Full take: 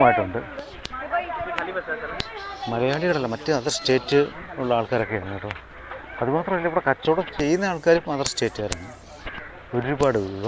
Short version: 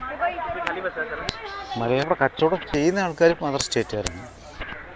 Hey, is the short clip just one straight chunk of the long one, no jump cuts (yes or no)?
no